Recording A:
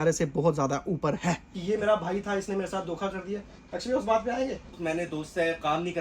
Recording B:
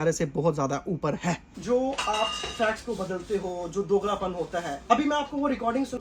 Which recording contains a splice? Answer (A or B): A